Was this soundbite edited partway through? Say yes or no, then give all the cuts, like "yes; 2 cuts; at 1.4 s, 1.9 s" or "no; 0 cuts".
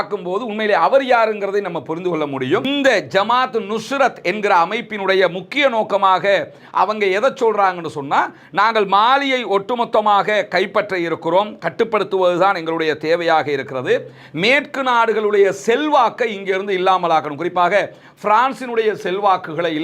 yes; 1 cut; at 2.6 s